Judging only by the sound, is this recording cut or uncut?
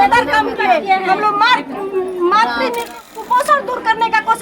cut